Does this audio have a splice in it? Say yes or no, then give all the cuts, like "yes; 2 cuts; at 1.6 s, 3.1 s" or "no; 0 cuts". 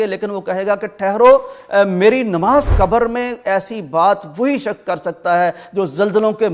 yes; 1 cut; at 2.7 s